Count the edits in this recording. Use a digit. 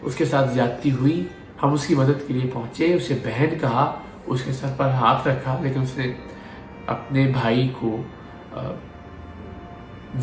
0